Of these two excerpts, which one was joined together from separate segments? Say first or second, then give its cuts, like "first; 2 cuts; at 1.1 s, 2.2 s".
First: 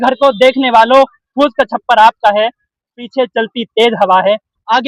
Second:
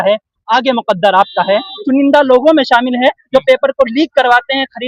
second; 1 cut; at 1.8 s